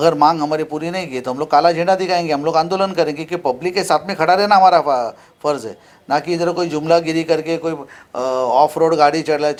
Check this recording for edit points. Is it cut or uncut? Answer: uncut